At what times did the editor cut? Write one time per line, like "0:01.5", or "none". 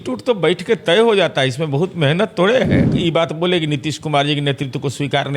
0:02.9